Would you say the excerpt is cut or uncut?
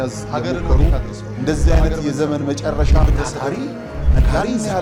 uncut